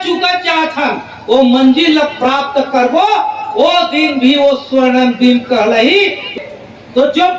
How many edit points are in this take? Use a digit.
1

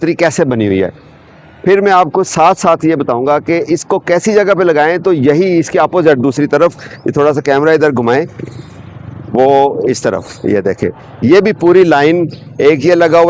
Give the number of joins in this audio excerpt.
0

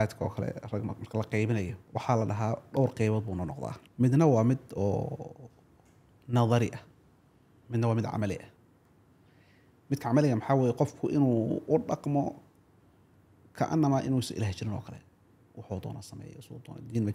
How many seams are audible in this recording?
2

